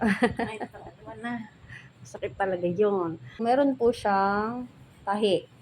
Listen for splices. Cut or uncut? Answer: cut